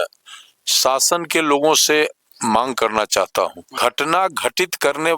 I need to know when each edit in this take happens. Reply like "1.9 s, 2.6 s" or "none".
3.7 s